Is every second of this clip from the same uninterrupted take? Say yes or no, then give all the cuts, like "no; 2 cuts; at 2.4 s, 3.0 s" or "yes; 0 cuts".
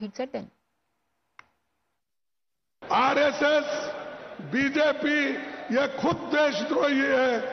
yes; 0 cuts